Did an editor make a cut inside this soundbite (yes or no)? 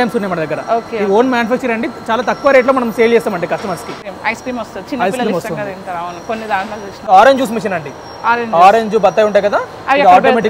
yes